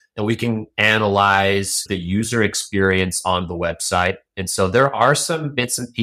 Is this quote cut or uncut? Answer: cut